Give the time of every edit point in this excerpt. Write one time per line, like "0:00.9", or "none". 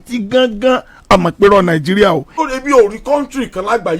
0:02.3